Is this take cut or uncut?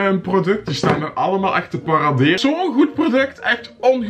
cut